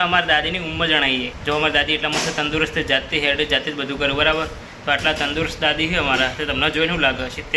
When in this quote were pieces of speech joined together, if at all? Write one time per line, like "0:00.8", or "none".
0:01.3

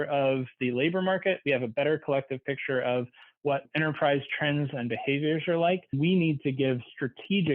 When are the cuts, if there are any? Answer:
0:05.9

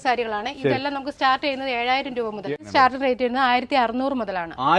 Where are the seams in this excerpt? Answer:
0:02.5

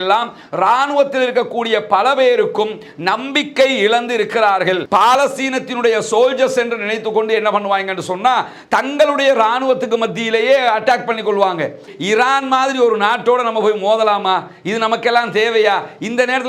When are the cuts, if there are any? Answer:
0:04.8
0:11.9

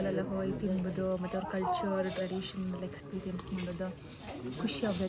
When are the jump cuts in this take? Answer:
none

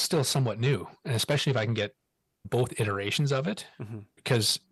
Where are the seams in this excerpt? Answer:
none

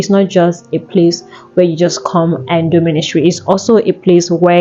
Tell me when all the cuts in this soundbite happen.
none

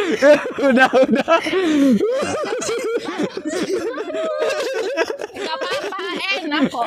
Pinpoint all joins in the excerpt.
none

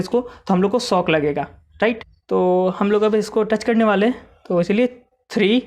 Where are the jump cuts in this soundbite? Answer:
0:02.1

